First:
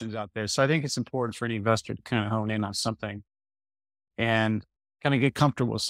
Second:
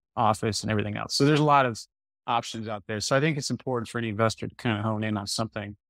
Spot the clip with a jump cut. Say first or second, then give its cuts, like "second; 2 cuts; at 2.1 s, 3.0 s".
first; 1 cut; at 4.8 s